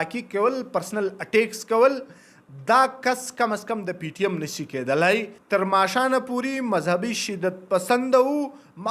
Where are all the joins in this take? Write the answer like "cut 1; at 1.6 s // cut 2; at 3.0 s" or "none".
cut 1; at 5.3 s